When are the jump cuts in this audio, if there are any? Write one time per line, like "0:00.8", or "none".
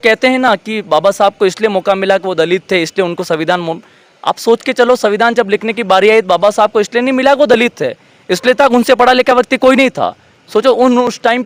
none